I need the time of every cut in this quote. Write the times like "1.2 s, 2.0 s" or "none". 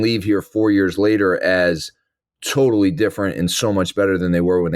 none